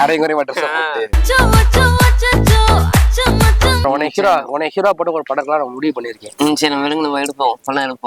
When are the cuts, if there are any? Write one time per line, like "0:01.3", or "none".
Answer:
0:01.2
0:03.8